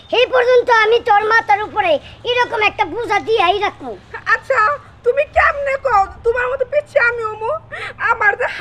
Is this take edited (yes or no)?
no